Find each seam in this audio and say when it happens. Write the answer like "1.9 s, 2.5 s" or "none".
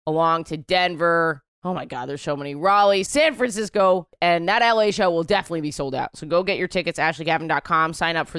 none